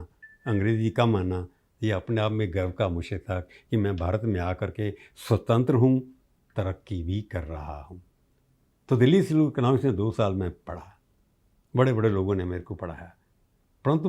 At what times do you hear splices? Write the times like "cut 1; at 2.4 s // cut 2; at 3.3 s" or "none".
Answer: none